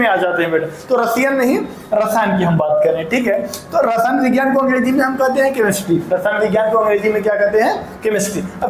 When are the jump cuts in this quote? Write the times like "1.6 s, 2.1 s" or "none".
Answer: none